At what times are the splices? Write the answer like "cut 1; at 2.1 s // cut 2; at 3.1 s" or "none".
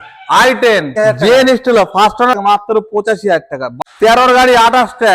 cut 1; at 0.9 s // cut 2; at 2.3 s // cut 3; at 3.7 s